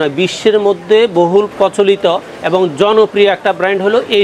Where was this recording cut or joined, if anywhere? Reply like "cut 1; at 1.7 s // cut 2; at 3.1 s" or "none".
cut 1; at 1.5 s